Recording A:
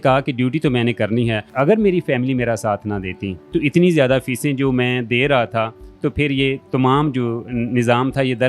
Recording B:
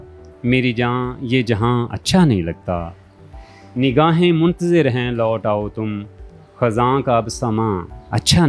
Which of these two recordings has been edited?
A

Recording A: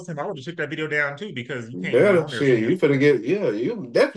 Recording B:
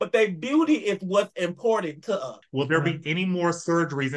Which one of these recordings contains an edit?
B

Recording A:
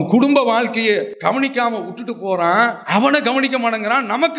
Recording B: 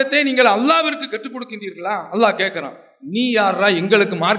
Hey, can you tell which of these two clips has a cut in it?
A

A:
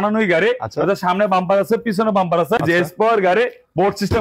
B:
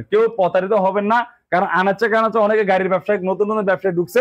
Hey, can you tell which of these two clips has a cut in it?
A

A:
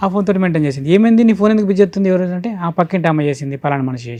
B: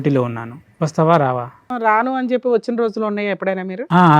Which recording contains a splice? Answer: B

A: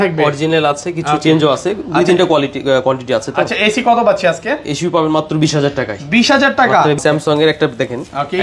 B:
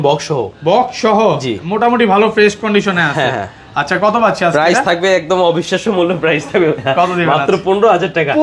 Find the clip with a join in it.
A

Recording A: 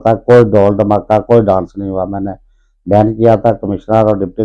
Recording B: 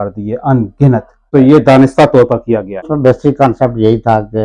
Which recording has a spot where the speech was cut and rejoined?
B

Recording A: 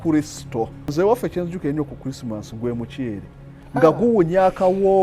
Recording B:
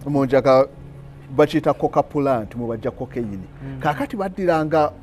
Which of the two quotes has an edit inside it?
A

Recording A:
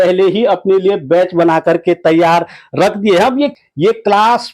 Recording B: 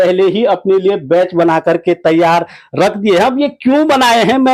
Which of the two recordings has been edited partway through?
A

